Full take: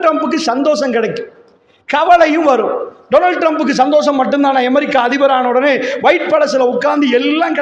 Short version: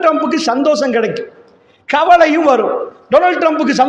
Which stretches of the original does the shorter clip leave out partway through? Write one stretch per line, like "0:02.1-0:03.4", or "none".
none